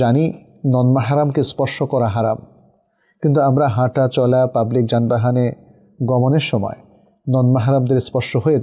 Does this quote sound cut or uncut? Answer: uncut